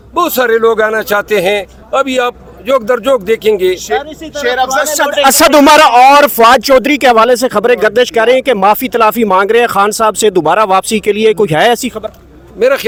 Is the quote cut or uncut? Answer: uncut